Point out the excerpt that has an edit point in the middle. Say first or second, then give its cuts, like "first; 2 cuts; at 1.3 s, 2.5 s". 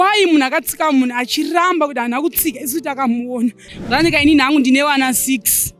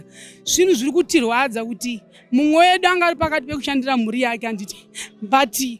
first; 1 cut; at 3.7 s